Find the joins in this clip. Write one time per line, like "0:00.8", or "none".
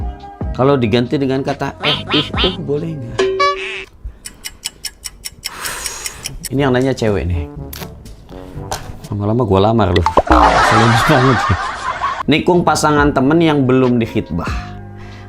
0:12.1